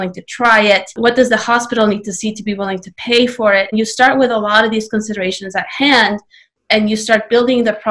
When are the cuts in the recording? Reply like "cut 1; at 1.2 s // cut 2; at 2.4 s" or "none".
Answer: cut 1; at 0.9 s // cut 2; at 3.7 s